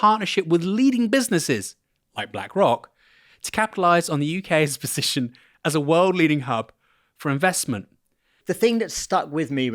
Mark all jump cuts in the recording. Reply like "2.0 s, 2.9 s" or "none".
8.3 s

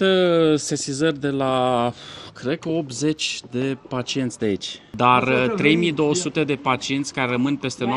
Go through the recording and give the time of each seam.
4.8 s

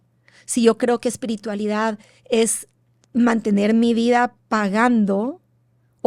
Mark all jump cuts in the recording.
4.4 s

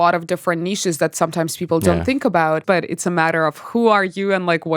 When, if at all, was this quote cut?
2.6 s

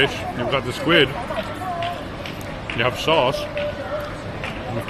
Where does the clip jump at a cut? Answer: none

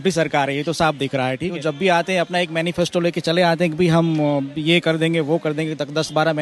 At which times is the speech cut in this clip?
1.4 s

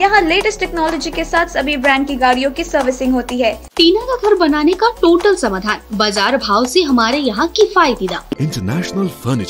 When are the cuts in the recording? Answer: 3.7 s, 8.4 s

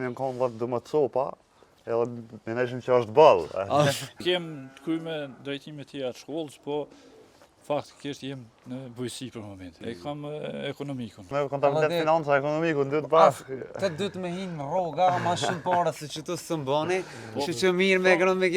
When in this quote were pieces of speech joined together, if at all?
4.2 s, 9.6 s, 11.3 s

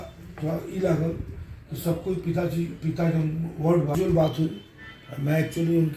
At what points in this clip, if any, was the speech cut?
3.9 s

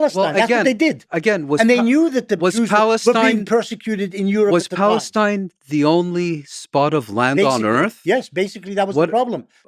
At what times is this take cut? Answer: none

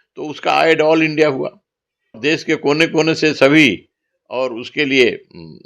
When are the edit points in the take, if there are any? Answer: 2.2 s

